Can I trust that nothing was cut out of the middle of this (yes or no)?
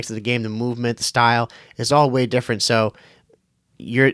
yes